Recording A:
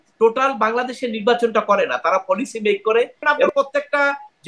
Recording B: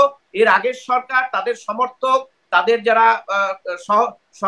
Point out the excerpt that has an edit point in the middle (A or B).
A